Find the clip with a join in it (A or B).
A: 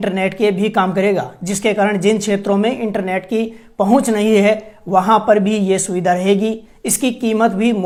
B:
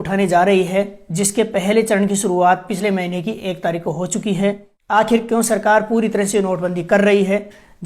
B